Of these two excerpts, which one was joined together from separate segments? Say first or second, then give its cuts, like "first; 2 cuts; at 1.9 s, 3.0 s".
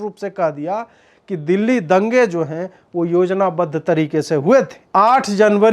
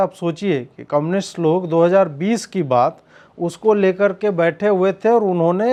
first; 1 cut; at 4.8 s